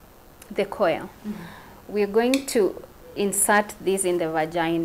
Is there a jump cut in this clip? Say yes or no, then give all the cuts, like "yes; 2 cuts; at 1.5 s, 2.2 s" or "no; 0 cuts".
no; 0 cuts